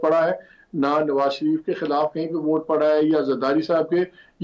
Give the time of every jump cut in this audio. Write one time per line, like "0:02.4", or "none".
none